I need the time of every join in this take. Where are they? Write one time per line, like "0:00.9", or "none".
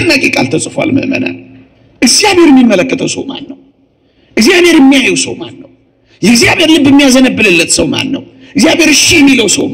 none